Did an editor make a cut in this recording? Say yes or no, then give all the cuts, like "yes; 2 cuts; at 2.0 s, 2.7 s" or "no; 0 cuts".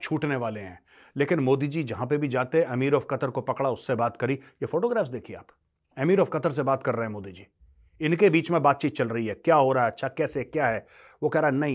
no; 0 cuts